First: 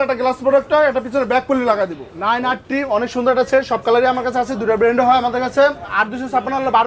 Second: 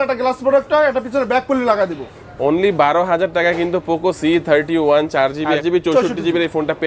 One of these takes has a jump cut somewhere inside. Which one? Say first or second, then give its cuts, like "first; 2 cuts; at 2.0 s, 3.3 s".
first; 2 cuts; at 2.1 s, 6.0 s